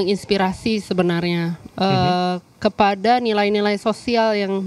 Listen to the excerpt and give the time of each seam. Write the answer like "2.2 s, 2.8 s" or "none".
none